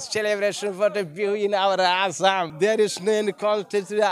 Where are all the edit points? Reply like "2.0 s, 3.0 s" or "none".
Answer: 2.5 s

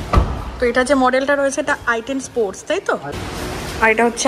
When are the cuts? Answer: 3.1 s

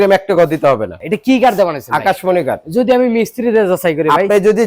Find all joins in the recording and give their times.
1.0 s

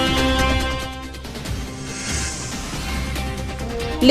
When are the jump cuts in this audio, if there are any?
2.5 s

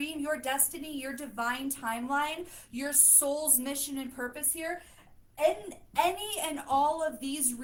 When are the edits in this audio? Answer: none

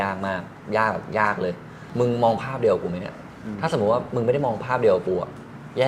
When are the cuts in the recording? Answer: 1.8 s

